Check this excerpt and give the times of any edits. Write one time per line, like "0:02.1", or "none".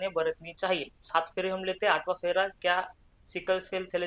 none